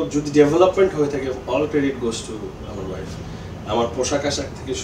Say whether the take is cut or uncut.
uncut